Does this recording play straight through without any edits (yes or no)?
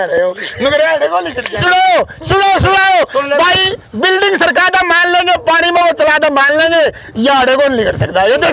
no